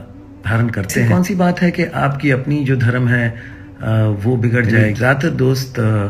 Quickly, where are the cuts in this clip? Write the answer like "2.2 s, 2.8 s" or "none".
1.0 s, 4.8 s

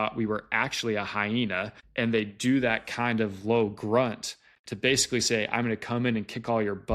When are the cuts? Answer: 1.8 s

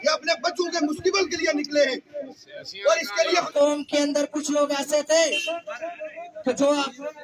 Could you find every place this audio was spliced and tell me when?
3.5 s

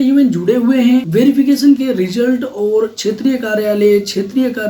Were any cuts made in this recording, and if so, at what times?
1.1 s

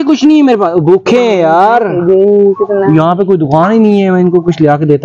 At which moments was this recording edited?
none

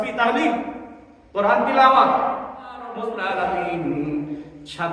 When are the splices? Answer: 3.1 s

